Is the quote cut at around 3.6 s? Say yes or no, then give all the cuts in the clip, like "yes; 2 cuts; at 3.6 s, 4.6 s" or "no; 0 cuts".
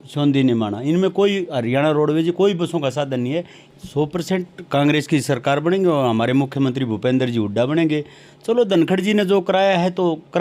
yes; 1 cut; at 3.6 s